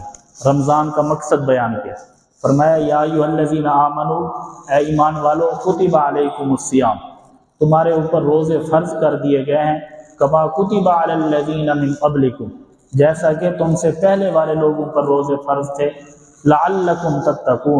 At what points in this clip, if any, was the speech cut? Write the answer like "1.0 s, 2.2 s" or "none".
none